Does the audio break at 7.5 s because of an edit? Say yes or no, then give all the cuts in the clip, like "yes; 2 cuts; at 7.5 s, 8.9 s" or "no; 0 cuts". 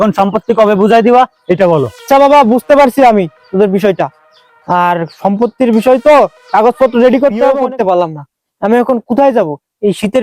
yes; 1 cut; at 7.5 s